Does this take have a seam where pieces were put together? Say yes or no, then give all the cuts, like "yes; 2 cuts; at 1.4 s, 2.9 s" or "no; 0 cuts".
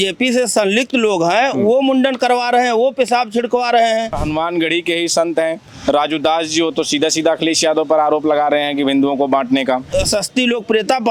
yes; 2 cuts; at 4.2 s, 9.9 s